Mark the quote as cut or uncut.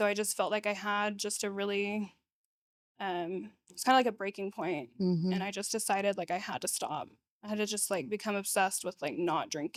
uncut